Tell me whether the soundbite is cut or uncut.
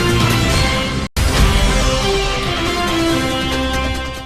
cut